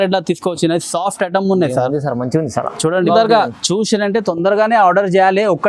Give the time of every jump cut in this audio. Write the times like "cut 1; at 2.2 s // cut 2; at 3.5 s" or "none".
cut 1; at 3.1 s